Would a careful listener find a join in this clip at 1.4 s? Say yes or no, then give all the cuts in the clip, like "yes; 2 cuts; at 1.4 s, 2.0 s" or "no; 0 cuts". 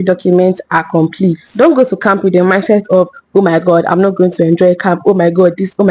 yes; 1 cut; at 1.4 s